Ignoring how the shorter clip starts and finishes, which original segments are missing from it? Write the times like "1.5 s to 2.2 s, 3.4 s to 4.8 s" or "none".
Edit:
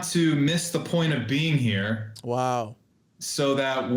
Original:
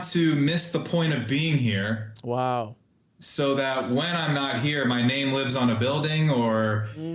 none